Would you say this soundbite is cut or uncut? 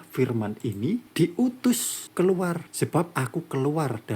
cut